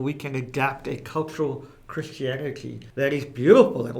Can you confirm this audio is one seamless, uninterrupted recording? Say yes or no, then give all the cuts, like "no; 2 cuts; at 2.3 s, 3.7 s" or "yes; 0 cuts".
no; 1 cut; at 2.8 s